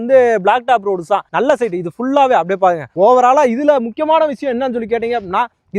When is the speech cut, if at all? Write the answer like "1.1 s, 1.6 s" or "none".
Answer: none

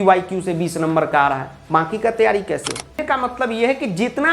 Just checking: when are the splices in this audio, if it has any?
3.0 s

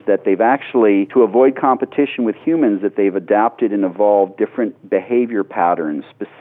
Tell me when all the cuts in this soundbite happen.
1.1 s

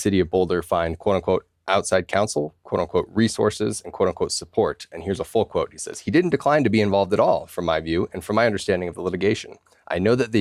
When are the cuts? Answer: none

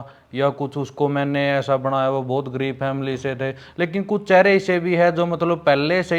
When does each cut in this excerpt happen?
none

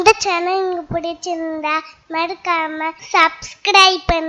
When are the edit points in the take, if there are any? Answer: 3.0 s

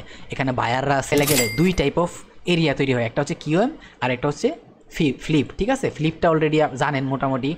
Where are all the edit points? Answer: 1.1 s

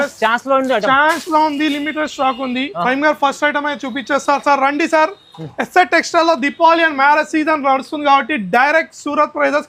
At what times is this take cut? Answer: none

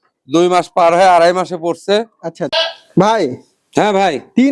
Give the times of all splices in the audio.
2.5 s

